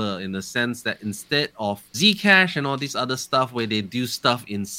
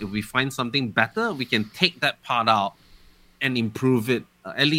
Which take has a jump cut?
first; 1 cut; at 1.9 s

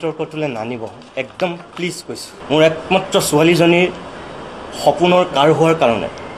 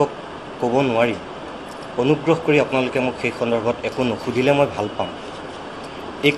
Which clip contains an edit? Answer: first; 1 cut; at 2.3 s

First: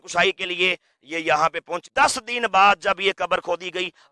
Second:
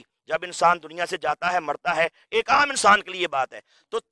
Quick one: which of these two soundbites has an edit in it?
first; 1 cut; at 1.8 s

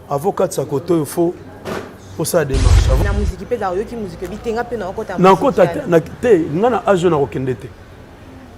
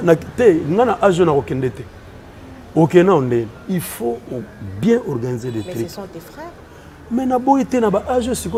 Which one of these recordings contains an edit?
first; 1 cut; at 3.0 s

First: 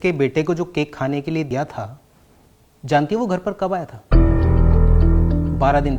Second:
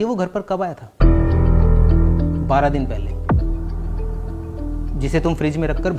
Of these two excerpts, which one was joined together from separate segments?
first; 1 cut; at 1.5 s

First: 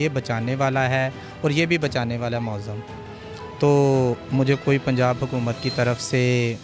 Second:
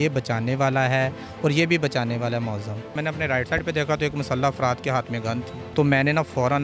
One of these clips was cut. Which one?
second; 2 cuts; at 2.9 s, 5.6 s

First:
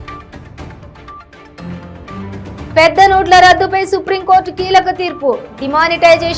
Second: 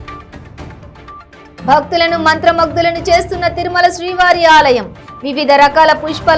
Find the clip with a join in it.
first; 1 cut; at 1.0 s

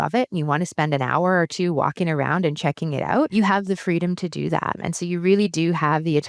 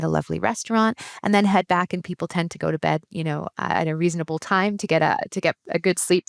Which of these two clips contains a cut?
first; 2 cuts; at 3.3 s, 4.8 s

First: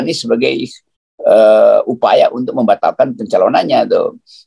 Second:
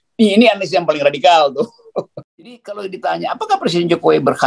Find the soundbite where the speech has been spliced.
second; 1 cut; at 2.7 s

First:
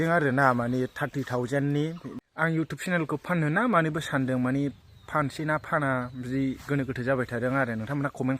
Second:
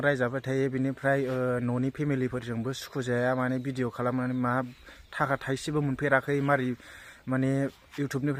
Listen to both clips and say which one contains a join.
first; 1 cut; at 2.1 s

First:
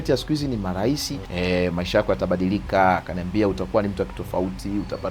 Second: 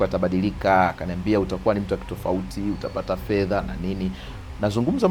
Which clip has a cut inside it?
first; 1 cut; at 1.2 s

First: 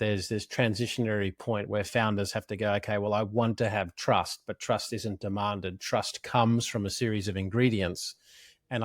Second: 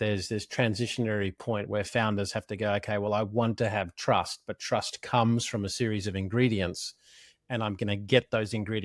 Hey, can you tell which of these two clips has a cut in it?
second; 1 cut; at 4.5 s

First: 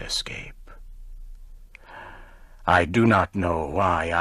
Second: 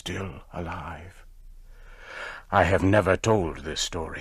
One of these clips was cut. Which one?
first; 1 cut; at 2.2 s

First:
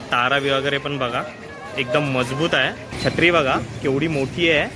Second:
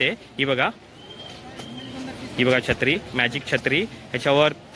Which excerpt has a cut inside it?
first; 1 cut; at 2.9 s

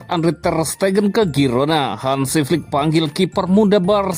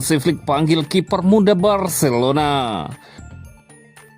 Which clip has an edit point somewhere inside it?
second; 1 cut; at 3.1 s

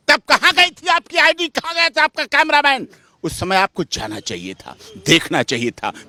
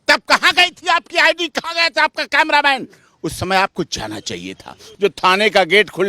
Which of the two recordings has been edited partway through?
second; 1 cut; at 4.8 s

